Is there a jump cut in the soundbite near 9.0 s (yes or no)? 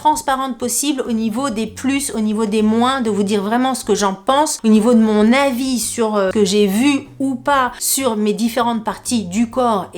no